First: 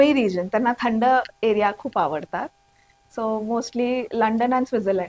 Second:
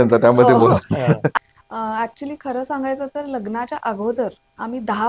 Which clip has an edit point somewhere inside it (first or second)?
second